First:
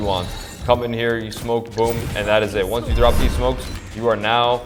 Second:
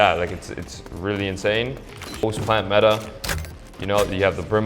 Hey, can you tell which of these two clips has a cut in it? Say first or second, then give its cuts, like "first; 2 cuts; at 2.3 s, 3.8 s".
second; 1 cut; at 2.2 s